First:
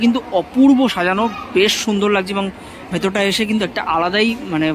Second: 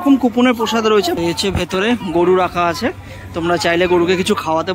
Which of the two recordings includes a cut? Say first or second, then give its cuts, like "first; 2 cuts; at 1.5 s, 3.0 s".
second; 1 cut; at 1.2 s